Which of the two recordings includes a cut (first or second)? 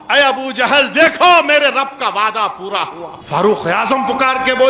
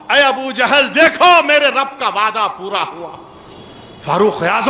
first